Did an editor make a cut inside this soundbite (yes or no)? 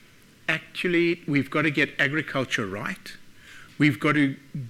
no